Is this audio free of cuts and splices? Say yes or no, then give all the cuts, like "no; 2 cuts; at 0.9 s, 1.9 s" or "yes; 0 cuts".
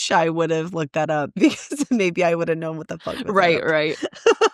yes; 0 cuts